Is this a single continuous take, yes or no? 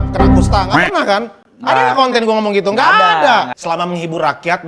no